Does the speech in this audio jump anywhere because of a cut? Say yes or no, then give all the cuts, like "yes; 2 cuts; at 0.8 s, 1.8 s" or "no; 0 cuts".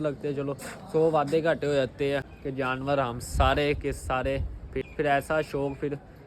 yes; 2 cuts; at 2.4 s, 4.8 s